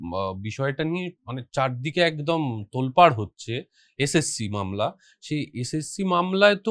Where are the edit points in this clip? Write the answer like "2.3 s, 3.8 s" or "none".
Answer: none